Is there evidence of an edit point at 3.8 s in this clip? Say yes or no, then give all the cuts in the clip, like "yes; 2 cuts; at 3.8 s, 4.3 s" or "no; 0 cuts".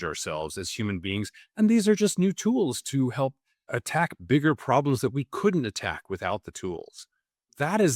yes; 1 cut; at 3.8 s